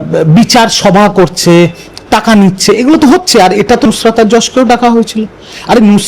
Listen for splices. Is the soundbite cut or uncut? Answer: cut